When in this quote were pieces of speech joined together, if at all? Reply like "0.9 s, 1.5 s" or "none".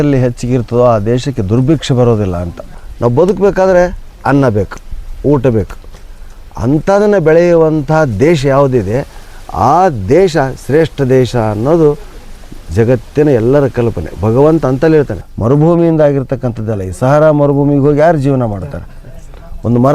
2.8 s, 15.2 s

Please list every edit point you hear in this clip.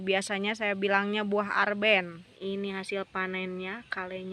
2.3 s

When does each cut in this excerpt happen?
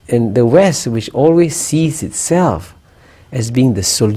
none

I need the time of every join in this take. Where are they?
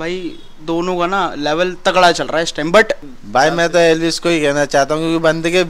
3.1 s

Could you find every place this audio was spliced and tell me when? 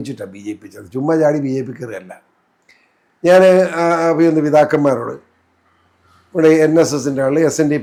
none

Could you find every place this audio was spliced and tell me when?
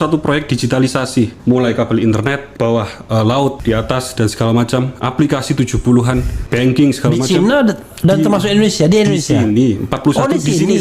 1.4 s, 3.6 s, 6.4 s

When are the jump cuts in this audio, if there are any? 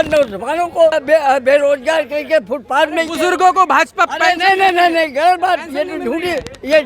1.0 s

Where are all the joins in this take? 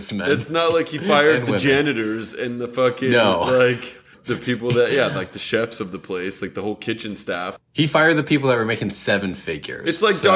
7.5 s

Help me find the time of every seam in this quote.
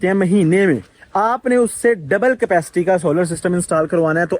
none

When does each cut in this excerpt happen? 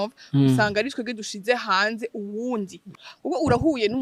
2.8 s

